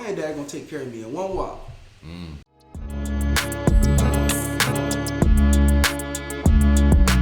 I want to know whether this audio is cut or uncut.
cut